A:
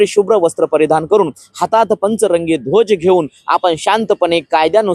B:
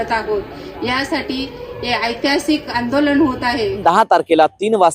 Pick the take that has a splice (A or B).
B